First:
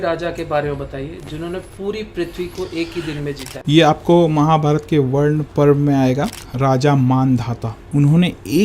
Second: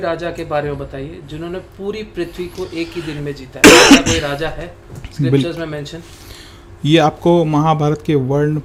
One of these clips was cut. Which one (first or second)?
first